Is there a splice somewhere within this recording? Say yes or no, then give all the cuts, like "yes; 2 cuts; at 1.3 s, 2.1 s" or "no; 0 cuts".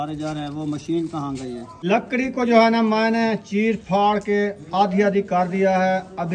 yes; 1 cut; at 1.7 s